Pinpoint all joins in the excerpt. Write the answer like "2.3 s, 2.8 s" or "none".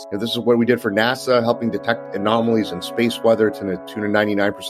none

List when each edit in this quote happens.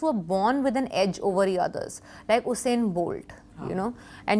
none

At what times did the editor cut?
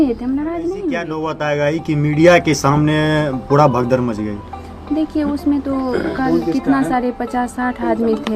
1.3 s

